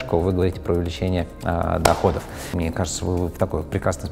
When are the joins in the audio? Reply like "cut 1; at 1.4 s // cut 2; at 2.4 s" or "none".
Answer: cut 1; at 2.5 s